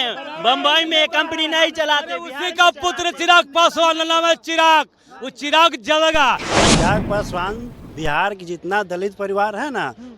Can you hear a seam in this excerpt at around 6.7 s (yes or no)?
yes